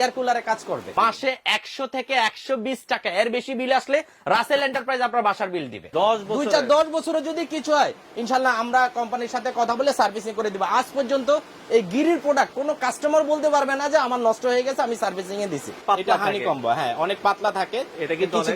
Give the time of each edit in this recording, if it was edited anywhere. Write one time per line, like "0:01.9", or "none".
0:00.9
0:05.9
0:15.7